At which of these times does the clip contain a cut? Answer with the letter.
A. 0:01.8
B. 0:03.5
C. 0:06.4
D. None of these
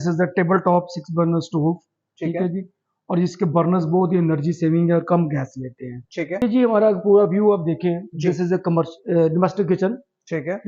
C